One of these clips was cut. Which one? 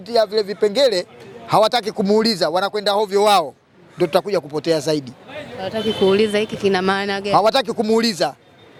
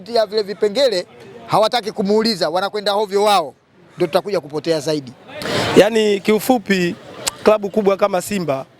second; 1 cut; at 5.5 s

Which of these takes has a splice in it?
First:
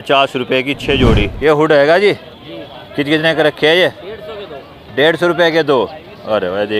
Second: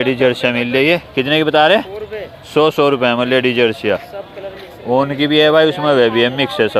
first; 1 cut; at 1.3 s

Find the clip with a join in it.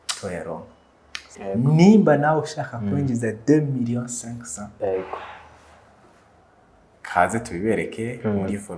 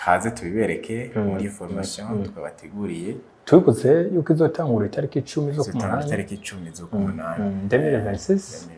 first; 1 cut; at 1.4 s

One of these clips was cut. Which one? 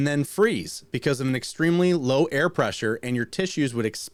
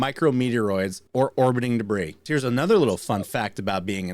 second; 2 cuts; at 1.0 s, 2.2 s

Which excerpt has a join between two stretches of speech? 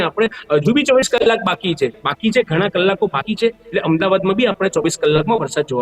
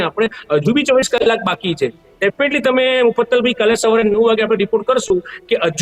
first; 1 cut; at 2.0 s

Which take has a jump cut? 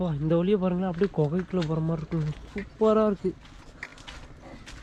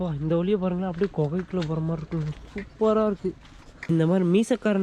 second; 1 cut; at 3.9 s

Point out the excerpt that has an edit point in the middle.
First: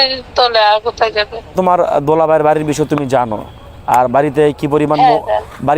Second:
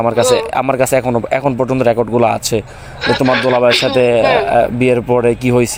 first; 1 cut; at 1.5 s

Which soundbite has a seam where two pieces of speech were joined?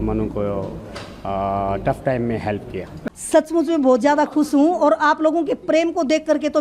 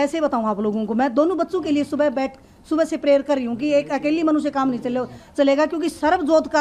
first; 1 cut; at 3.0 s

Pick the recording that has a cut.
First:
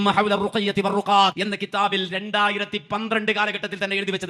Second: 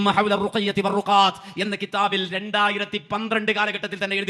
first; 1 cut; at 1.4 s

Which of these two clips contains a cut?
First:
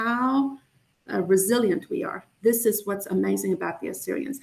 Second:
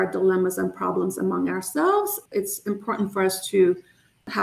second; 1 cut; at 2.2 s

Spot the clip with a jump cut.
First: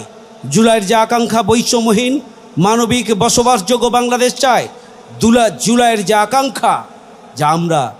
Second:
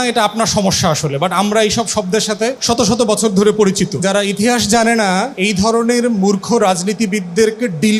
second; 3 cuts; at 2.6 s, 4.0 s, 5.3 s

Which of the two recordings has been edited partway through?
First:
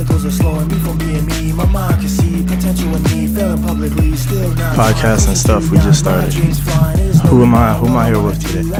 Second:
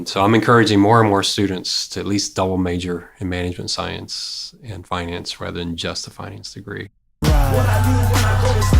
second; 1 cut; at 7.2 s

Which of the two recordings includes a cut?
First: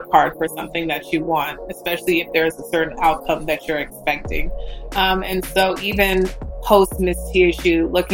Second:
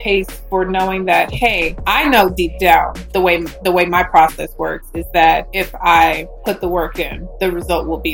second; 5 cuts; at 1.7 s, 3.0 s, 5.6 s, 6.3 s, 7.2 s

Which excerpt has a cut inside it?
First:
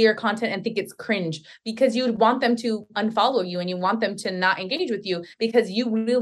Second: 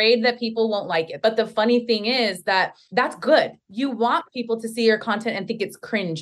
second; 3 cuts; at 1.1 s, 2.8 s, 3.6 s

